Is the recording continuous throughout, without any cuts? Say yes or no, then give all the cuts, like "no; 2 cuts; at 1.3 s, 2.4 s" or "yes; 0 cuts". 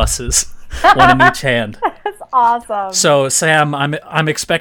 no; 1 cut; at 2.8 s